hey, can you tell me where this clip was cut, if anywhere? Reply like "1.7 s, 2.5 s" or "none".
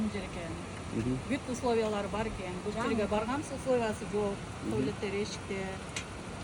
none